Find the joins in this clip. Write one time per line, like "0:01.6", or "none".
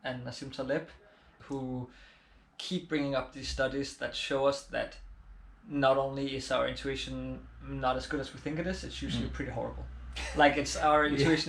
0:01.3